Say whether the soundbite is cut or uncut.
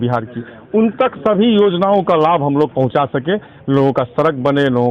uncut